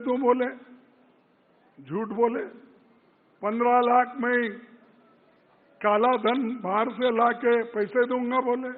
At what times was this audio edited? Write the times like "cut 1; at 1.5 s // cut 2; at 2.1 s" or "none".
none